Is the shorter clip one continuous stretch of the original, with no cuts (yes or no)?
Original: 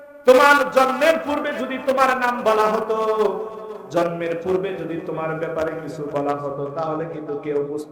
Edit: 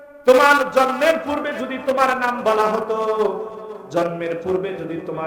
yes